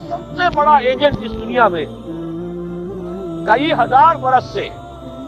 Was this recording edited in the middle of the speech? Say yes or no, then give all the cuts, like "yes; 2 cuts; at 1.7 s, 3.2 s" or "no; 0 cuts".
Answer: yes; 2 cuts; at 2.0 s, 3.5 s